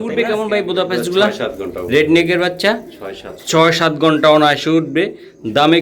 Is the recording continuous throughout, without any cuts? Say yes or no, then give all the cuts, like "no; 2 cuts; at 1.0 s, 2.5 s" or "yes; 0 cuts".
yes; 0 cuts